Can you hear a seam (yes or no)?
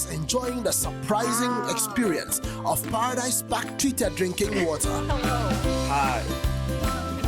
no